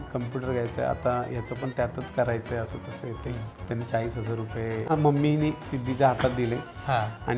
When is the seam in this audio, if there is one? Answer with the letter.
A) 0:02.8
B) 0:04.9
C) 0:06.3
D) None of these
B